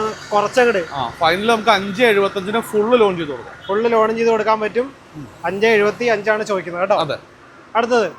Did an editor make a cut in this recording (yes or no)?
no